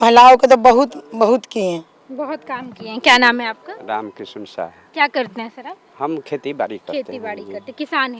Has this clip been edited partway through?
no; 0 cuts

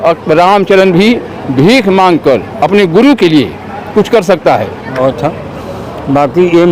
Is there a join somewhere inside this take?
yes; 1 cut; at 5.0 s

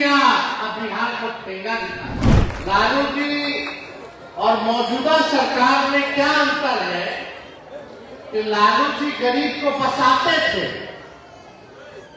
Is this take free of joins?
no; 1 cut; at 2.2 s

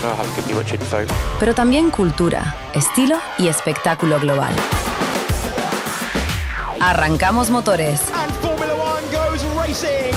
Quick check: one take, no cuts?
yes; 0 cuts

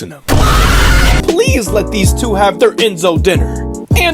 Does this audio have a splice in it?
yes; 1 cut; at 1.2 s

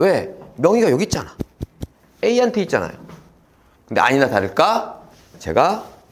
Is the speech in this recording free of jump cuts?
yes; 0 cuts

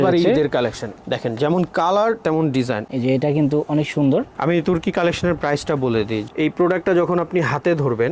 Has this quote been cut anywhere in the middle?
yes; 2 cuts; at 2.8 s, 6.2 s

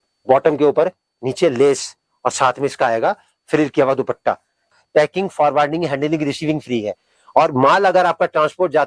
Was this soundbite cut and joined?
yes; 1 cut; at 4.6 s

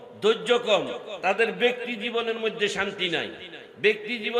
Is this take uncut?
yes; 0 cuts

